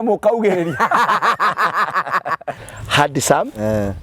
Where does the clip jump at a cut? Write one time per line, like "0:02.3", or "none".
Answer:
0:02.6